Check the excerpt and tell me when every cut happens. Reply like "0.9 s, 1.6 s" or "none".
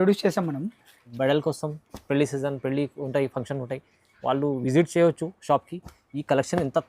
1.0 s